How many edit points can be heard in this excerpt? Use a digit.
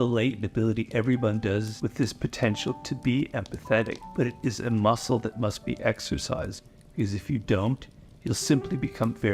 2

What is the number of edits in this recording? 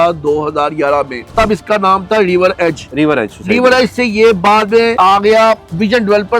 3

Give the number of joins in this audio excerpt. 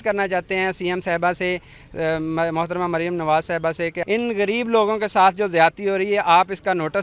1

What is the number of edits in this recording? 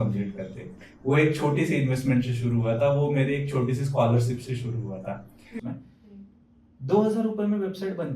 1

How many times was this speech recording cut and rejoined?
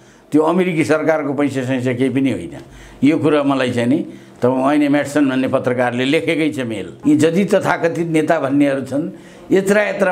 1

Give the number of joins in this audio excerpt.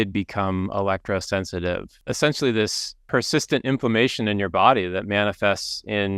2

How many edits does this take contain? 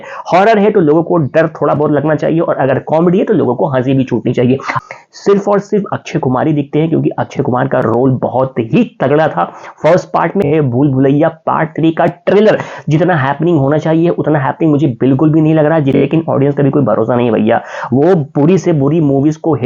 3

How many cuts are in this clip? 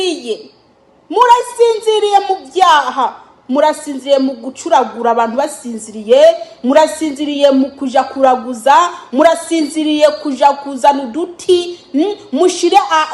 0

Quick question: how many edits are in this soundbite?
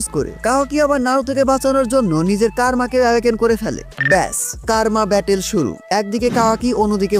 0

